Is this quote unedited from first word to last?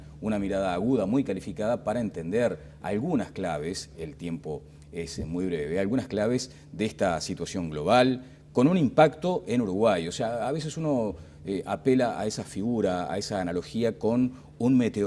no; 1 cut; at 1.8 s

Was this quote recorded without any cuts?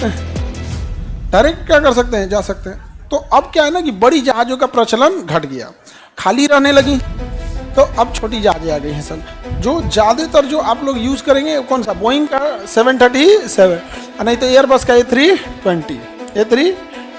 yes; 0 cuts

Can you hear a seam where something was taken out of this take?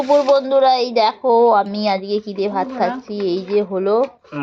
no; 0 cuts

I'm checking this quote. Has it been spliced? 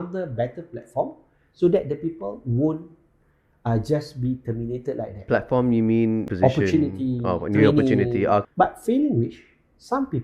yes; 3 cuts; at 5.2 s, 6.3 s, 8.5 s

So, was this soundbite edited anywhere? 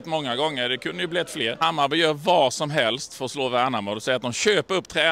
yes; 1 cut; at 1.6 s

